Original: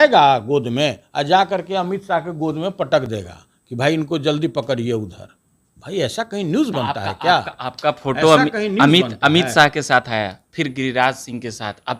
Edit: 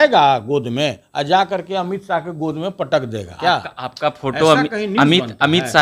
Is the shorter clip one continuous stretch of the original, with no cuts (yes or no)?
no